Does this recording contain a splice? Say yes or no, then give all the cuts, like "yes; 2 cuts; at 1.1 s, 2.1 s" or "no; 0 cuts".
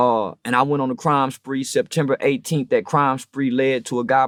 no; 0 cuts